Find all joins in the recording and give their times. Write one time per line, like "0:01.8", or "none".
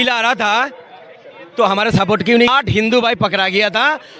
0:02.5